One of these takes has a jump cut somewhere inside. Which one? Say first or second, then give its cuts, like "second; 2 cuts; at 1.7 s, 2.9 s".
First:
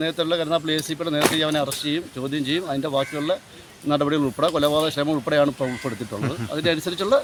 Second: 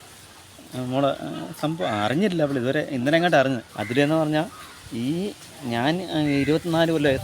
second; 1 cut; at 3.7 s